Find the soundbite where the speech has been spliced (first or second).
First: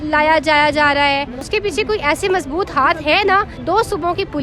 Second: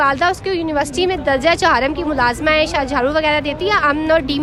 first